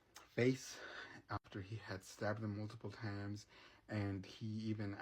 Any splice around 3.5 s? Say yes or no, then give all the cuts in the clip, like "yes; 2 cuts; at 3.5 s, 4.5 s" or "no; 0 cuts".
no; 1 cut; at 1.4 s